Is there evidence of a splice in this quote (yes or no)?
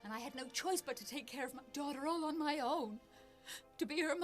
yes